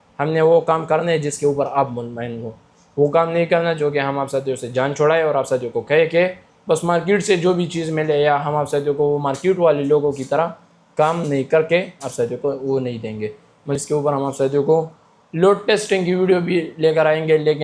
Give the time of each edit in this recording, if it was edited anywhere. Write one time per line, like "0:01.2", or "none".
0:13.8